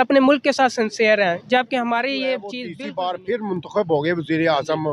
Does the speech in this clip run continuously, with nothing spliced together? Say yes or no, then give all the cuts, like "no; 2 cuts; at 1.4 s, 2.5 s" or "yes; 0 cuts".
no; 1 cut; at 2.6 s